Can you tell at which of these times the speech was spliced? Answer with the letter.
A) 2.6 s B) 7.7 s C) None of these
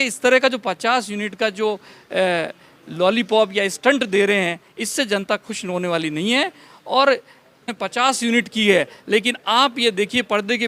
B